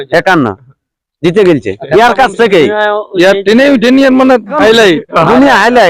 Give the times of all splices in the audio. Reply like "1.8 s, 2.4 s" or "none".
4.6 s